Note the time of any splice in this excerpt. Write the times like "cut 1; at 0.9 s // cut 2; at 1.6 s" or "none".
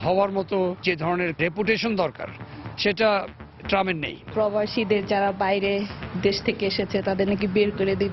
cut 1; at 1.1 s // cut 2; at 4.3 s